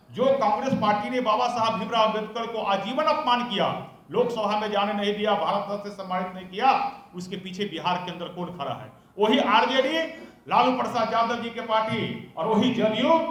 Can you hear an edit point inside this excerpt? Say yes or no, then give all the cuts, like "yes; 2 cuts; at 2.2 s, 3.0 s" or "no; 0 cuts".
no; 0 cuts